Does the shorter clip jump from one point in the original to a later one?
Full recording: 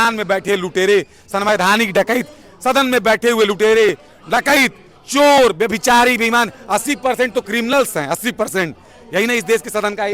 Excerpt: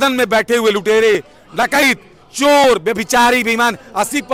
no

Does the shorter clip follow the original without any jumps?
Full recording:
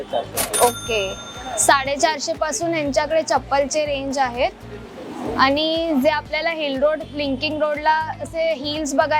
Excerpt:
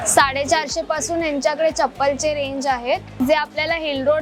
no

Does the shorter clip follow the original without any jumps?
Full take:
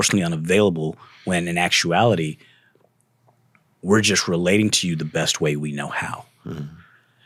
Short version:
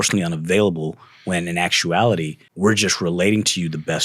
no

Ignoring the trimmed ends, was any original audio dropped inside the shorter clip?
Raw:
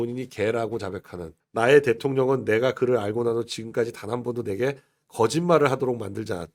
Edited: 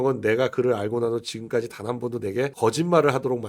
yes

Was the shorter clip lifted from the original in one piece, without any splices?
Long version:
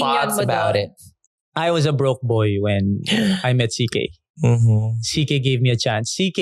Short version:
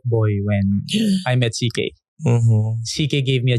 yes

